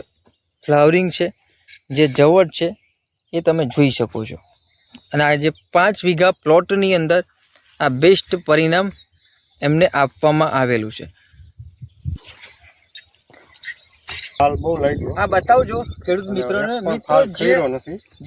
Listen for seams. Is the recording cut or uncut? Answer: cut